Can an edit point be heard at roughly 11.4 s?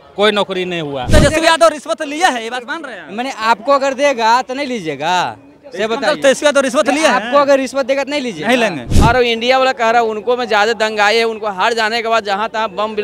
no; 2 cuts; at 1.1 s, 8.9 s

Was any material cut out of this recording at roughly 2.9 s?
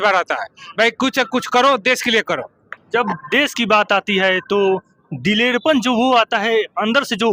no; 0 cuts

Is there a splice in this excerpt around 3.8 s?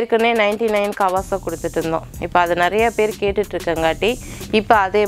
no; 0 cuts

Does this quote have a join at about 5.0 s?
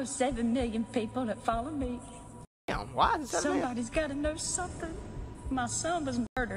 yes; 1 cut; at 5.0 s

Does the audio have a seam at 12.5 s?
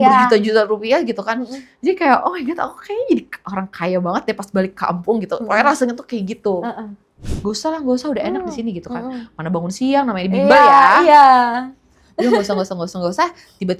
no; 1 cut; at 7.3 s

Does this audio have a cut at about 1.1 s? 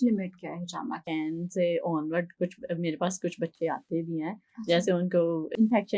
yes; 1 cut; at 1.1 s

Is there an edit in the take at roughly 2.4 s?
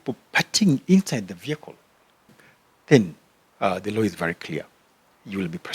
yes; 1 cut; at 2.4 s

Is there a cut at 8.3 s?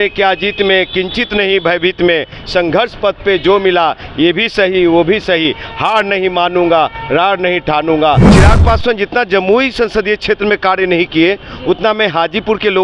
yes; 1 cut; at 8.3 s

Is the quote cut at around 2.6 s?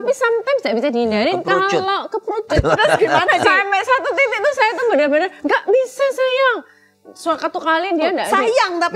yes; 1 cut; at 2.6 s

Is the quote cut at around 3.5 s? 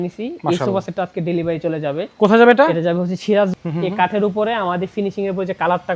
yes; 1 cut; at 3.5 s

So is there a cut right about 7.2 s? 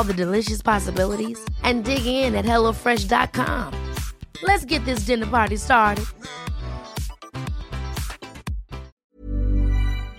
no; 1 cut; at 8.9 s

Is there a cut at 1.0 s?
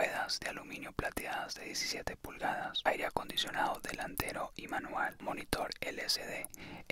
no; 2 cuts; at 2.8 s, 5.2 s

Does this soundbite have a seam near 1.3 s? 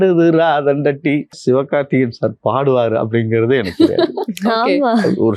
yes; 1 cut; at 1.3 s

